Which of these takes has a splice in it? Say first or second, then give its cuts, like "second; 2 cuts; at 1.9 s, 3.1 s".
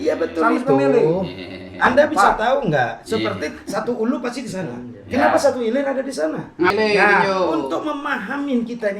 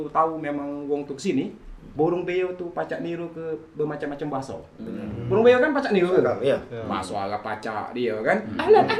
first; 1 cut; at 6.7 s